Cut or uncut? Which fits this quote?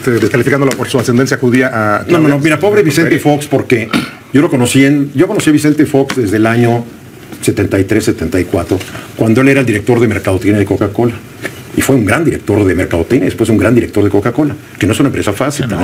uncut